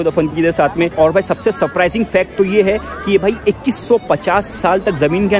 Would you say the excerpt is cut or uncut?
cut